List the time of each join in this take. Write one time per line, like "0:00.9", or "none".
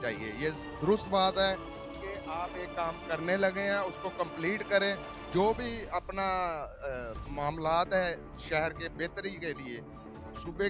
none